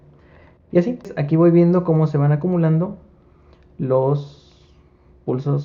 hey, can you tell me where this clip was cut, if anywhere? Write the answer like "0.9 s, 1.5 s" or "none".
1.2 s